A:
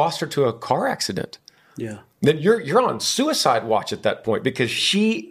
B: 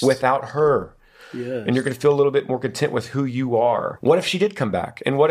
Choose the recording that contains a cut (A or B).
B